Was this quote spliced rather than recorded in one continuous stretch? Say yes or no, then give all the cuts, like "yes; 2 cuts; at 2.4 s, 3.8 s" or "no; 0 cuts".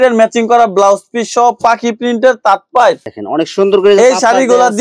no; 0 cuts